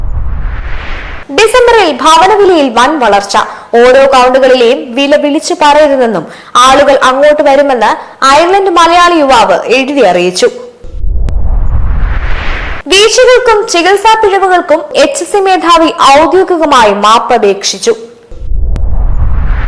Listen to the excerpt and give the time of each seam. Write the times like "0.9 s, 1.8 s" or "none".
1.2 s